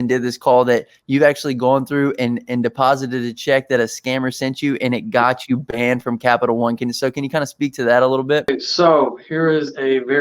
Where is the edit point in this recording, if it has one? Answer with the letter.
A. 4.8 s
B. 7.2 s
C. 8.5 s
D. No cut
C